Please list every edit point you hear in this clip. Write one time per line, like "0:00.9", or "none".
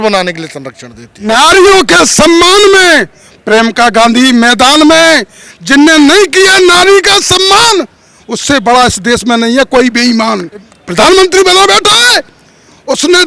0:01.3
0:10.8